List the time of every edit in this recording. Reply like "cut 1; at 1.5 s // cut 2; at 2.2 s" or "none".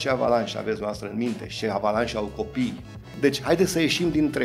cut 1; at 3.1 s